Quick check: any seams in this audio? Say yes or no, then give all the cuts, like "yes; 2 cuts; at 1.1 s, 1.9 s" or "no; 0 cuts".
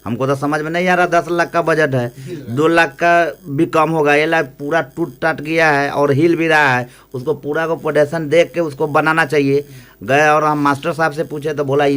no; 0 cuts